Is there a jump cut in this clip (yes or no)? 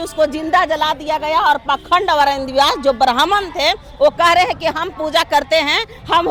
no